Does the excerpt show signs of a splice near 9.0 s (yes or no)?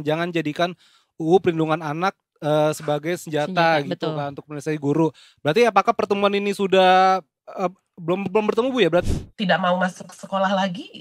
yes